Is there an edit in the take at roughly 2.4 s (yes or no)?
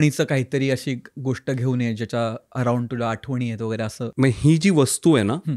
no